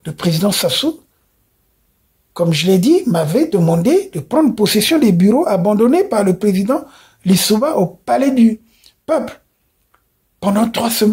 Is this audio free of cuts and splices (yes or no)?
yes